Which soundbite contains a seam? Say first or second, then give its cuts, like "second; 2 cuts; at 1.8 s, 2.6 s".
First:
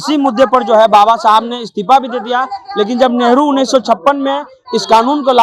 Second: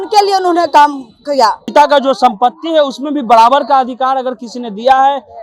second; 1 cut; at 1.6 s